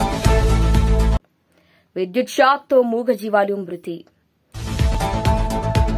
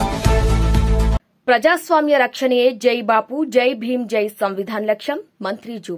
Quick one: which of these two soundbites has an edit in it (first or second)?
second